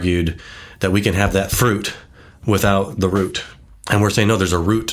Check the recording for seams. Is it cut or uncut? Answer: uncut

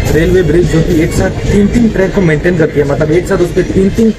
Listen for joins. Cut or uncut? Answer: uncut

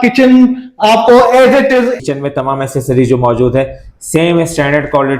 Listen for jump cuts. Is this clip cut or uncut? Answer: cut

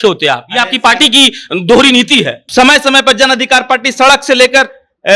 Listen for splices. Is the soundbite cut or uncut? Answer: cut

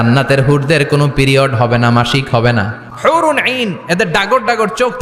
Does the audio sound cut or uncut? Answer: cut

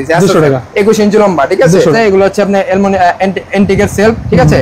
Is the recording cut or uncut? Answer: cut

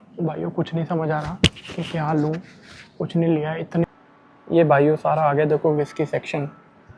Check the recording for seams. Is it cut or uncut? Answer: cut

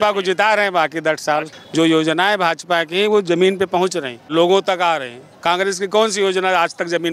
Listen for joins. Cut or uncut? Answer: cut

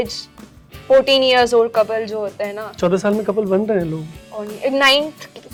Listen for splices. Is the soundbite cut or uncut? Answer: uncut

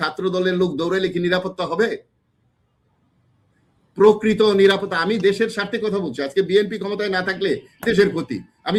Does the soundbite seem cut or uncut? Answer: uncut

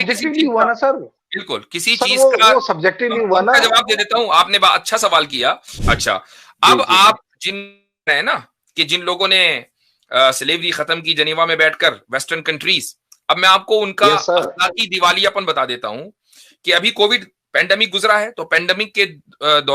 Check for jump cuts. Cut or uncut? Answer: cut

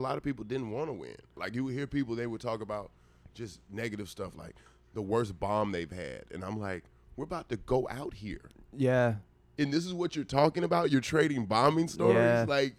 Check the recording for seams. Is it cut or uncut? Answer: cut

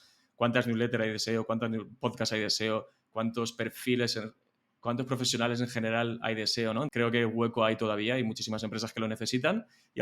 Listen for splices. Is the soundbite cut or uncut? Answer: cut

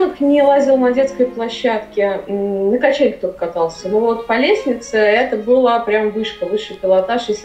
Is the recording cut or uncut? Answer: uncut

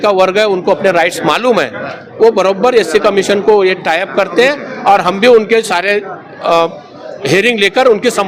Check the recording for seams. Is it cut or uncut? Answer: uncut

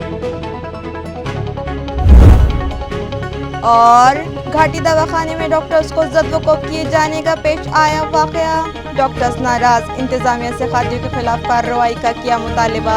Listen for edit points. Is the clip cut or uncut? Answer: cut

